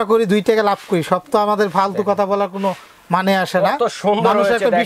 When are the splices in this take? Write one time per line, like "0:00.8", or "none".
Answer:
none